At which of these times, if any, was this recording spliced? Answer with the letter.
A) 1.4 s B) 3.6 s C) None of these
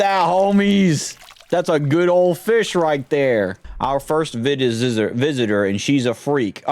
B